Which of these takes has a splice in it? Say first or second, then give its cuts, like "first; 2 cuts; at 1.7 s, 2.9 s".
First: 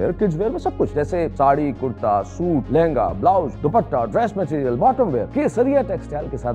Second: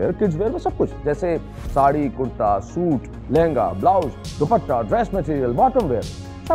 first; 4 cuts; at 1.0 s, 2.7 s, 3.5 s, 5.3 s